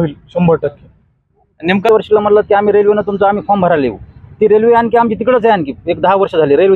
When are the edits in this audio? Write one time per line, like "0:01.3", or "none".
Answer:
0:01.9

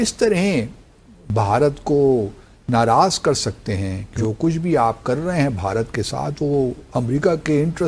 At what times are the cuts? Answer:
0:04.1

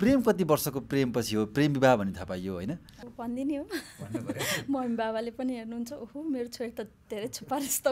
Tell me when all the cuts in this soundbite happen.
0:03.0

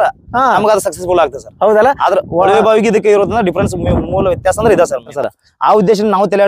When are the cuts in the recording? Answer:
0:05.1

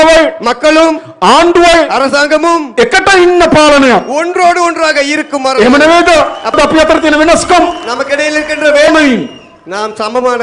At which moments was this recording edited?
0:06.5
0:08.9

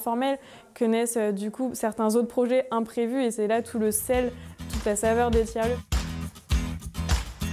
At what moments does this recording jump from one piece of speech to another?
none

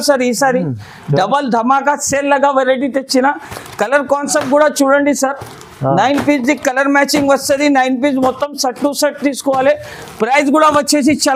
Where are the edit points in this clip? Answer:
none

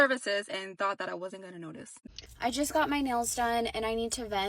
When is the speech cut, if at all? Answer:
0:02.0

